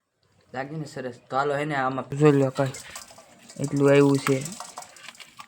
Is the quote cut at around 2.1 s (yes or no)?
yes